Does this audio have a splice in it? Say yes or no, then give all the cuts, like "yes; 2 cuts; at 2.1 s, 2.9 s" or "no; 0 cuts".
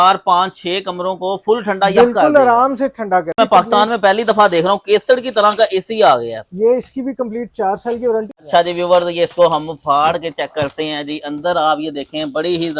yes; 2 cuts; at 3.3 s, 8.4 s